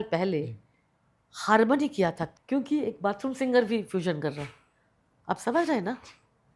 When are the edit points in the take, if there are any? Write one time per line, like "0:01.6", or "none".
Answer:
0:02.3